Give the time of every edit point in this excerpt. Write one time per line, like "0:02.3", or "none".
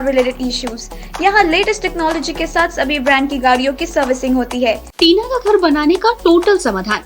0:04.9